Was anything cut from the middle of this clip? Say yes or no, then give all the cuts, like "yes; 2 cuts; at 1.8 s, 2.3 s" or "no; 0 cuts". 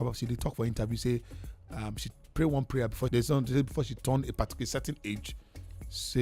yes; 1 cut; at 3.1 s